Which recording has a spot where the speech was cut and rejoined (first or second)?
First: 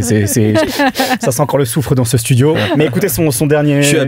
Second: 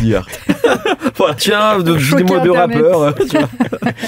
second